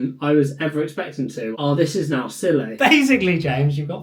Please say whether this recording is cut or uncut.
cut